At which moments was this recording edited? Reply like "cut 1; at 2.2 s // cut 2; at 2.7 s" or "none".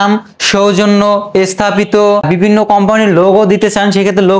cut 1; at 2.3 s